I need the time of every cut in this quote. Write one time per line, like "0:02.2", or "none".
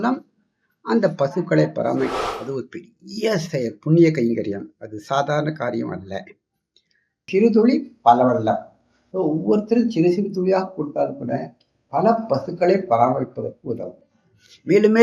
0:02.2
0:07.3